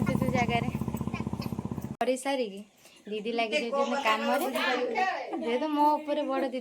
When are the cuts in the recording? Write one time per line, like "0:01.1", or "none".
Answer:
0:02.0